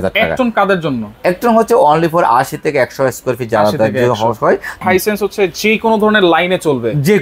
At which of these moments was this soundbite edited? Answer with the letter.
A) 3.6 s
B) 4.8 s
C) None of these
B